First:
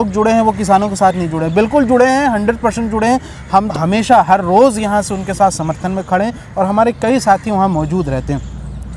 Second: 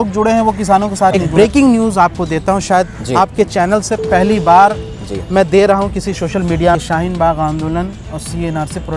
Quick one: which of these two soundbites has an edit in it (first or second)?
second